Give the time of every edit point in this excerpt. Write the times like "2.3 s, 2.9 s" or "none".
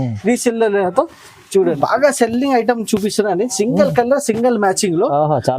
1.8 s